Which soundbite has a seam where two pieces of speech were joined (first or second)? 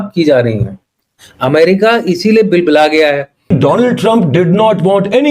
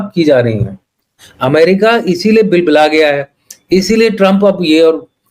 first